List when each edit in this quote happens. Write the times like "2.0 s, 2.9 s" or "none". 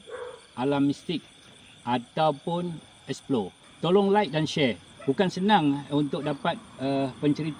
3.6 s, 4.9 s